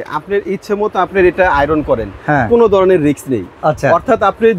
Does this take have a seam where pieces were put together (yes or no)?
no